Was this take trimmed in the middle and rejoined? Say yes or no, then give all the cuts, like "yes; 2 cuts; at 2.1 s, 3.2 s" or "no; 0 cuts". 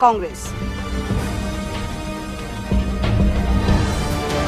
no; 0 cuts